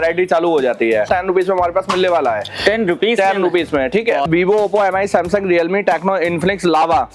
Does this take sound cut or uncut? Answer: cut